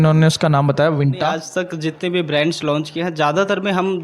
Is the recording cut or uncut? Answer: cut